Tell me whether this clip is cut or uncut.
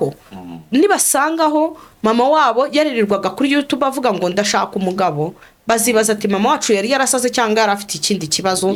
uncut